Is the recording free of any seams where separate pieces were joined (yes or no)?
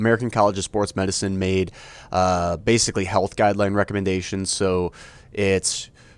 yes